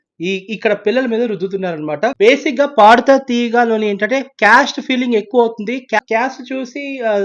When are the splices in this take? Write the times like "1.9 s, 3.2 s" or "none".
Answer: 2.1 s, 6.0 s